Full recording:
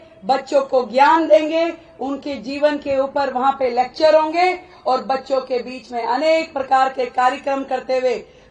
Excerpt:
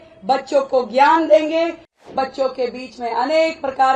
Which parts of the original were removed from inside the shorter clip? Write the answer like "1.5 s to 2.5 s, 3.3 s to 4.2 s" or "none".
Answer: 2.1 s to 5.0 s